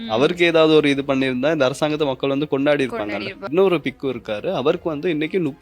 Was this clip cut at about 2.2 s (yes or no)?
no